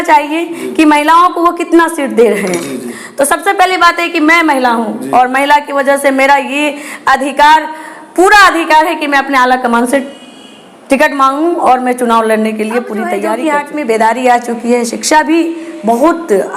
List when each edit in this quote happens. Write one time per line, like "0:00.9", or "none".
0:13.2

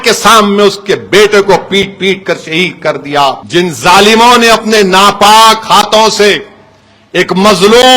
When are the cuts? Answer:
0:03.4

